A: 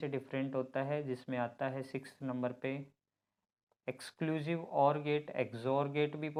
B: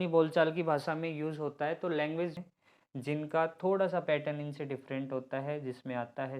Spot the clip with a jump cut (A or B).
B